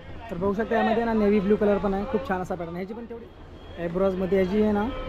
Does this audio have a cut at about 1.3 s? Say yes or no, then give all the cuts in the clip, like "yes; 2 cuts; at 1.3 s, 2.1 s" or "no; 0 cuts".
no; 1 cut; at 3.0 s